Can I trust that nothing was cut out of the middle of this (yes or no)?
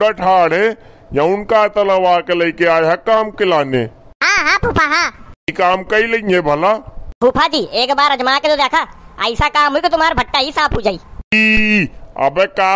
yes